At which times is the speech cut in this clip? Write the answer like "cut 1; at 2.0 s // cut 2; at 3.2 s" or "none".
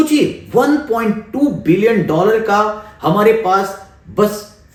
none